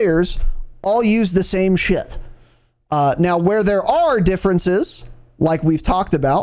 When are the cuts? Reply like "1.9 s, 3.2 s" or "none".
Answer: none